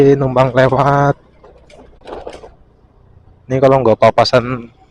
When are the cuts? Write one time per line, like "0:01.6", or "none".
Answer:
0:01.9